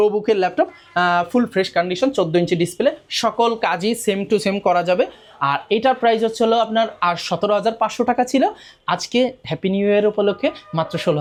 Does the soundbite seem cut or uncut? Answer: uncut